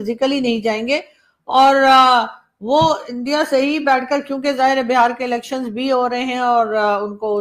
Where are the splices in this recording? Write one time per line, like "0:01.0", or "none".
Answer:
none